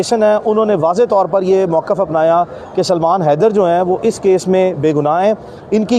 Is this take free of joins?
yes; 0 cuts

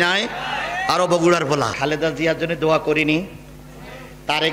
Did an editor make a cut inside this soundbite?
yes; 1 cut; at 1.7 s

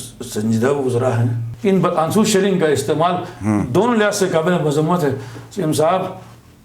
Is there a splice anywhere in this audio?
yes; 1 cut; at 1.5 s

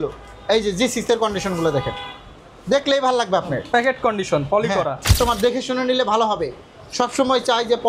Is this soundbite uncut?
no; 1 cut; at 5.1 s

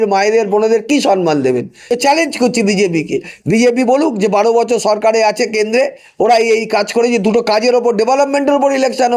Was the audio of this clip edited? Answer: yes; 1 cut; at 1.9 s

